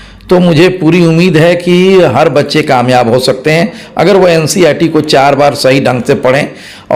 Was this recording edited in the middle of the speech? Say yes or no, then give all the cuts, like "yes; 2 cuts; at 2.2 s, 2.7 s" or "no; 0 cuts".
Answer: no; 0 cuts